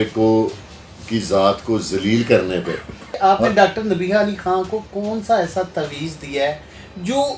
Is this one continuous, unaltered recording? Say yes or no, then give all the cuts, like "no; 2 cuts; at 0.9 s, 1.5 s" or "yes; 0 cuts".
no; 1 cut; at 3.1 s